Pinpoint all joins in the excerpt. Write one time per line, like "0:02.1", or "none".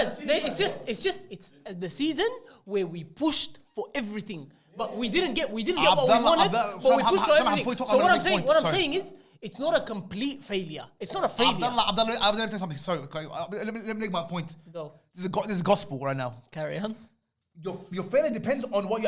none